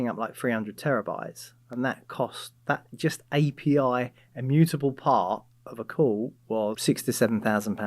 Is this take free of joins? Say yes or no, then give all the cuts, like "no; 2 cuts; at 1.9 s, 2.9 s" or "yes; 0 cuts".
no; 1 cut; at 6.8 s